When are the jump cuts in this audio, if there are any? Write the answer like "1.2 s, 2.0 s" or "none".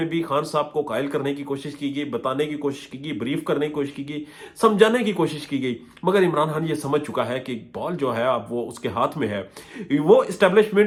none